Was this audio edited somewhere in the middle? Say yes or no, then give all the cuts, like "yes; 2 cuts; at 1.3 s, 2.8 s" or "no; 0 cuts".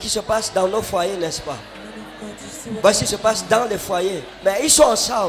yes; 1 cut; at 4.3 s